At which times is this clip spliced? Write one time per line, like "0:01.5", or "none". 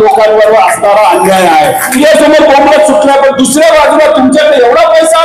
0:01.9